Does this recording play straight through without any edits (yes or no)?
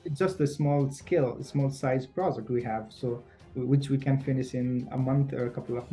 yes